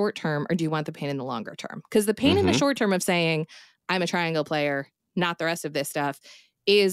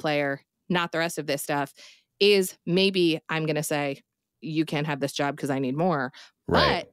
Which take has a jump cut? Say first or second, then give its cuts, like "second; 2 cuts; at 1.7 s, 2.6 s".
second; 1 cut; at 4.3 s